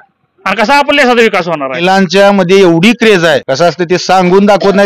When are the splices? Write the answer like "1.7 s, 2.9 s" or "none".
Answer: 1.8 s, 3.5 s